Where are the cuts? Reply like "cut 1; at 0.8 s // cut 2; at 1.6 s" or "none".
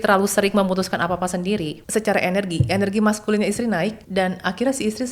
cut 1; at 1.8 s // cut 2; at 4.0 s